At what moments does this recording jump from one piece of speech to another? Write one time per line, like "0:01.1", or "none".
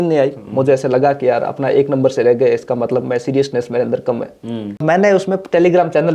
0:04.8